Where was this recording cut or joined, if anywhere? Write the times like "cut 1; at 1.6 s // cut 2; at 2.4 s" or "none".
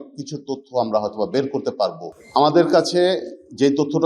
cut 1; at 2.1 s